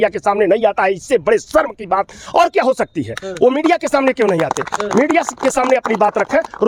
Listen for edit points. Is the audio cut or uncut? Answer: uncut